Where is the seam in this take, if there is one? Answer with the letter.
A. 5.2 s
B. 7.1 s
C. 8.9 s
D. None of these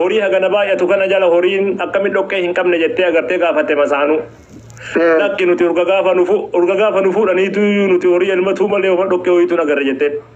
D